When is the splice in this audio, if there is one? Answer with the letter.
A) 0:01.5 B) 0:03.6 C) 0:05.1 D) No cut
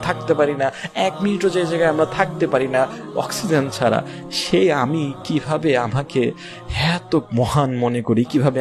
D